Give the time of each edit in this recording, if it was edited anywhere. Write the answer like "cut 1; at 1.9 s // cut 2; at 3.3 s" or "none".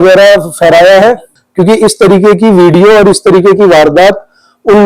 cut 1; at 1.3 s